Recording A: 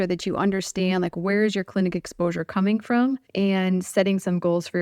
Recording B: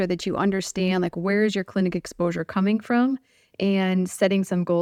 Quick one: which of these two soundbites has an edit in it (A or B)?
A